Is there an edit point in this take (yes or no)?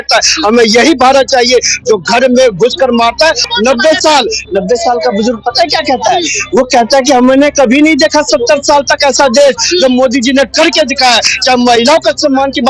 yes